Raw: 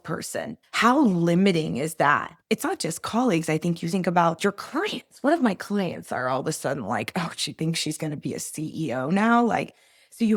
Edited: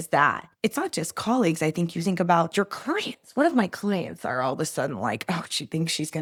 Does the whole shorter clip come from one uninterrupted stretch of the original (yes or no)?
yes